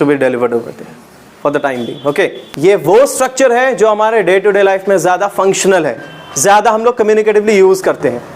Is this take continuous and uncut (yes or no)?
no